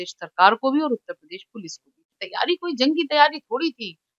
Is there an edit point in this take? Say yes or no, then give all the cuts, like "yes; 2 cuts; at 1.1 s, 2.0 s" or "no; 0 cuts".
yes; 1 cut; at 2.2 s